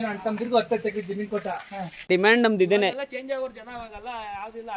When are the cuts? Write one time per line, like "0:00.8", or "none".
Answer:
0:02.1